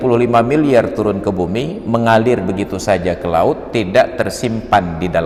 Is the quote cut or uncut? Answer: uncut